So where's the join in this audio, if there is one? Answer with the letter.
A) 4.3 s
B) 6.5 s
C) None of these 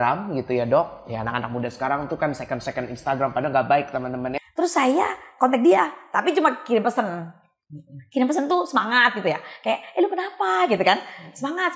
A